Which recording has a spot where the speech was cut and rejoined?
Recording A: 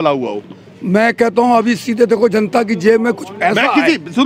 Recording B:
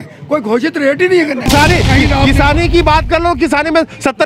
B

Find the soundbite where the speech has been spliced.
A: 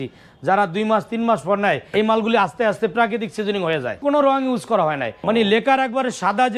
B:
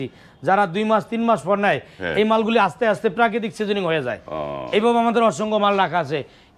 A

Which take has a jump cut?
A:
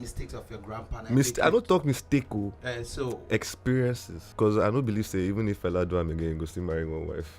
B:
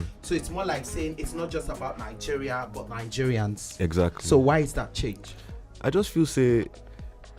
A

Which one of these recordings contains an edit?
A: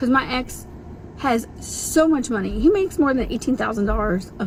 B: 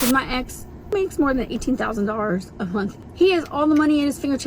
B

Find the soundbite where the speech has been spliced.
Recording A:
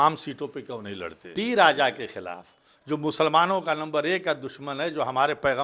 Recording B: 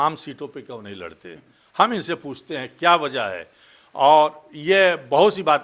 A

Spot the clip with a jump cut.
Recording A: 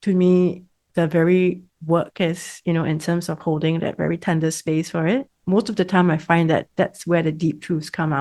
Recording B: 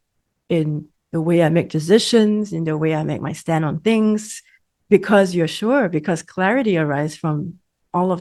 A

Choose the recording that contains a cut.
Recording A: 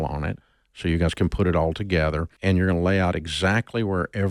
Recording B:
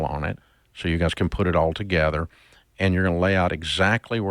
A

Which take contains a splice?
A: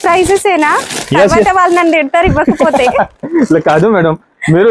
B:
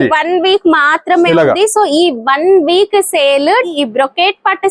B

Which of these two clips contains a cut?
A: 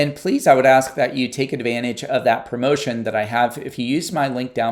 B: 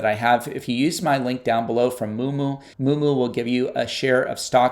B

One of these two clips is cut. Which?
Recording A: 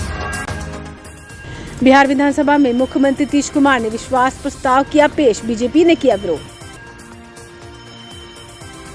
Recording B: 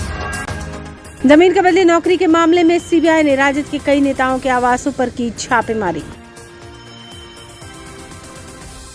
B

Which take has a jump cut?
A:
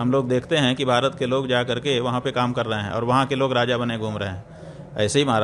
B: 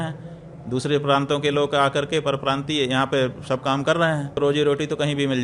B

